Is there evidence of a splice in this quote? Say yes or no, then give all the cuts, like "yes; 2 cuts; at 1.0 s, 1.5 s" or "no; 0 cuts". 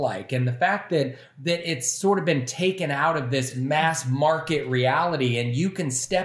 yes; 1 cut; at 3.5 s